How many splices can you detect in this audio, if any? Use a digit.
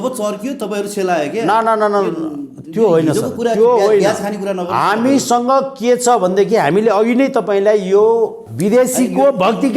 1